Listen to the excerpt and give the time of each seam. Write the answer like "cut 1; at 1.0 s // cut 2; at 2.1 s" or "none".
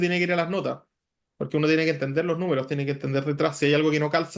none